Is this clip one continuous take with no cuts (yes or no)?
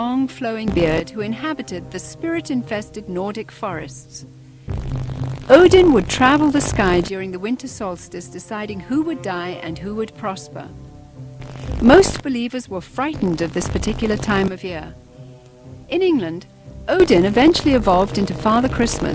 yes